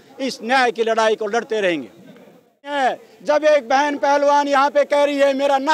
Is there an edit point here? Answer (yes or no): yes